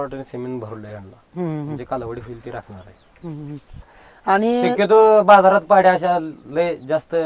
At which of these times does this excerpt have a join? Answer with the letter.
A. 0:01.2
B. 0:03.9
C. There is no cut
B